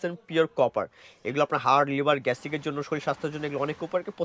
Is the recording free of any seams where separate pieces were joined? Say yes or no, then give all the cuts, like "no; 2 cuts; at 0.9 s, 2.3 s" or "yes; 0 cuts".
yes; 0 cuts